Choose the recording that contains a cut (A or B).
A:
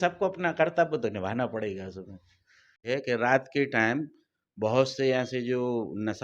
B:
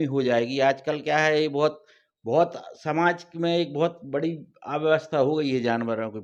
A